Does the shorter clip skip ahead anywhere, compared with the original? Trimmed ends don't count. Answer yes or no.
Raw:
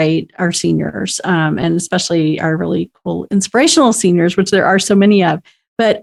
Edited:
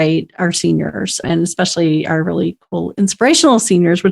yes